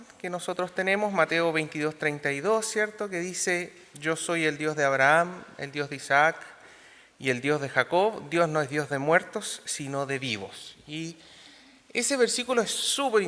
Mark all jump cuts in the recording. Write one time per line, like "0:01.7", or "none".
0:05.2